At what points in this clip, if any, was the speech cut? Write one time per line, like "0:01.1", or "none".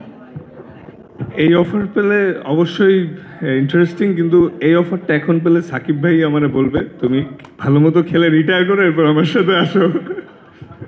none